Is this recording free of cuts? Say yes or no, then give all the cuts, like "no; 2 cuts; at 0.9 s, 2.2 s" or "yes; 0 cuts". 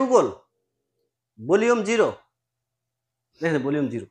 yes; 0 cuts